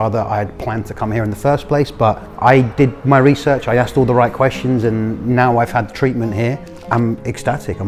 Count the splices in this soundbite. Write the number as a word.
zero